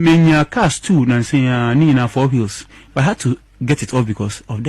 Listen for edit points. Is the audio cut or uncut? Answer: uncut